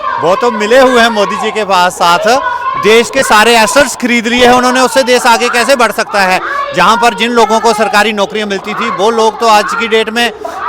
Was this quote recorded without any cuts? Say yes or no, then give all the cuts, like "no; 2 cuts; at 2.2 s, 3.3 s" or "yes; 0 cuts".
yes; 0 cuts